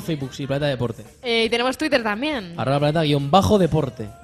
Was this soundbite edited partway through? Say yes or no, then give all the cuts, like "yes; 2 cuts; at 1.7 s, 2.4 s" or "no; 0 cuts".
yes; 1 cut; at 1.7 s